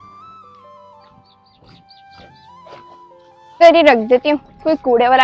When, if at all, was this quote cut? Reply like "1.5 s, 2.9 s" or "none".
3.6 s